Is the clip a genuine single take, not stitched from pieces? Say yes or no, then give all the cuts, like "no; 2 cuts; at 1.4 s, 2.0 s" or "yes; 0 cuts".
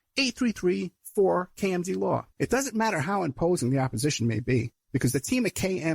no; 1 cut; at 2.3 s